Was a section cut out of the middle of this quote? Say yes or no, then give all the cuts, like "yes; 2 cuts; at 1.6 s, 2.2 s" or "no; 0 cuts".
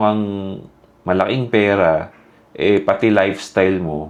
no; 0 cuts